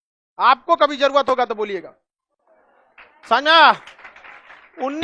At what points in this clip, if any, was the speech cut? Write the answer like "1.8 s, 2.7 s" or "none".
none